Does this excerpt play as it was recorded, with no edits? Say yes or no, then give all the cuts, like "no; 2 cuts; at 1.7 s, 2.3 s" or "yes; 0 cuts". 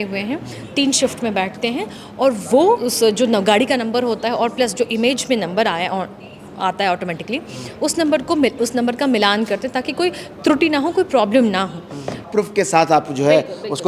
no; 2 cuts; at 2.9 s, 12.2 s